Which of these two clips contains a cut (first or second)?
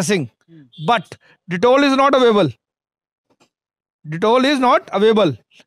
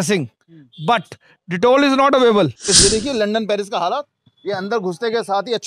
second